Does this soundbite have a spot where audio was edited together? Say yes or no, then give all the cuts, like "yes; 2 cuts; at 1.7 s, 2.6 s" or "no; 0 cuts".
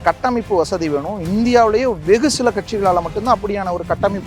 no; 0 cuts